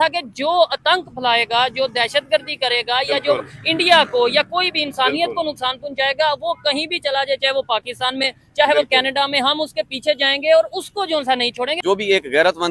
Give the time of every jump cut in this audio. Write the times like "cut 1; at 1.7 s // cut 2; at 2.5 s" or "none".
cut 1; at 11.7 s